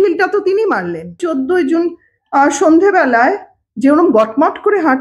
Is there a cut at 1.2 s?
yes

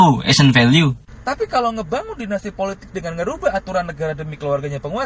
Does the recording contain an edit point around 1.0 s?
yes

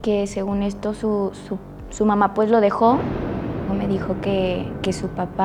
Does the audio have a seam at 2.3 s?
no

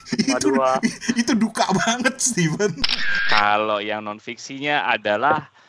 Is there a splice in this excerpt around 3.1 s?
yes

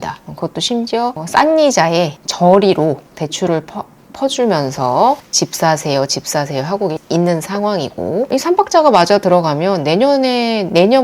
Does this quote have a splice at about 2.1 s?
no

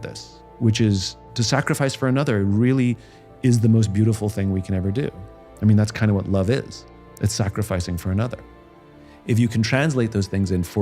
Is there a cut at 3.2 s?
no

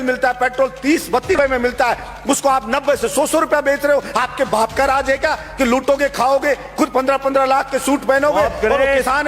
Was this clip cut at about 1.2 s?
yes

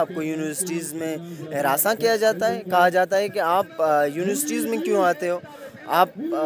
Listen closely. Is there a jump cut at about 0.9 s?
no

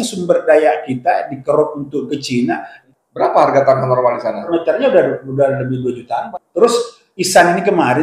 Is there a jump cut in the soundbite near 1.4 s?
no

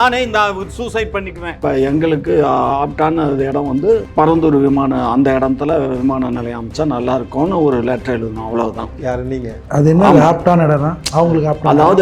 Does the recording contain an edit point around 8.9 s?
no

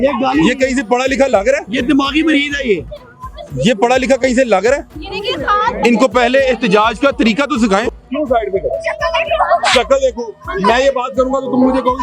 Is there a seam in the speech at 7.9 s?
yes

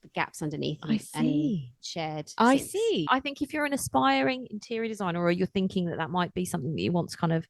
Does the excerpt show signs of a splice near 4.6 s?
no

